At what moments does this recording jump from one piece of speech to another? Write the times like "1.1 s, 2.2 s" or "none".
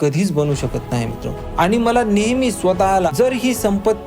1.4 s, 3.1 s